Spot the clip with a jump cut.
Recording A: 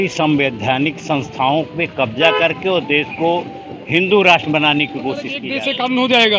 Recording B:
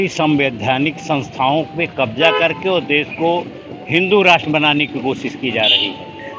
A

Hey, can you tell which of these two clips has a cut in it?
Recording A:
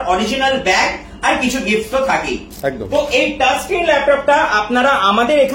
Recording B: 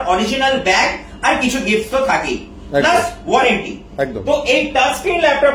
A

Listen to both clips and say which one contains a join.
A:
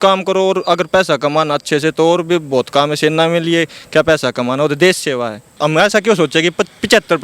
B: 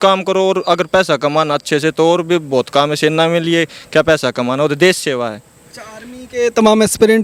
A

